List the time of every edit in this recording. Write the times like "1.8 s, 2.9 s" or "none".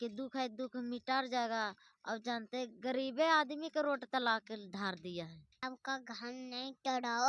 5.6 s

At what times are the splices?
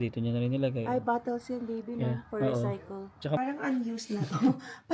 3.4 s

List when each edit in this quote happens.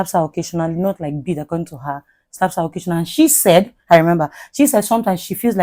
none

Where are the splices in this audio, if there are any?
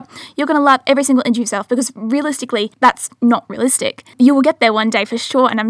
2.7 s, 4.2 s

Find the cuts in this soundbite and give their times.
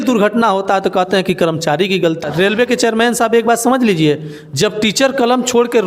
2.2 s

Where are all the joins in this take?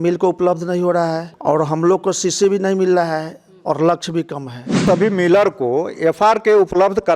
1.3 s, 4.8 s

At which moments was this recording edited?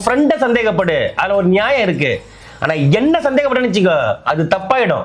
none

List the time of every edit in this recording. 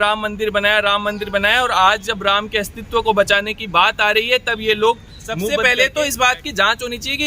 5.5 s

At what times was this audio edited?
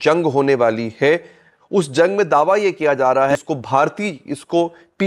3.4 s

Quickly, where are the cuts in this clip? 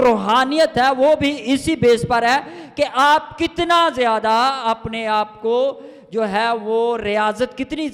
none

